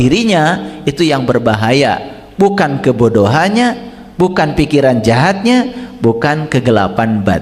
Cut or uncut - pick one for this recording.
uncut